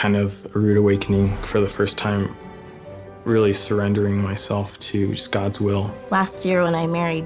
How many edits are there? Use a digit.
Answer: 1